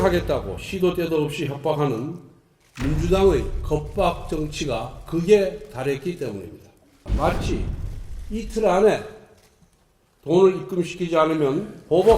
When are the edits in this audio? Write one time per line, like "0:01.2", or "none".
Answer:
0:07.0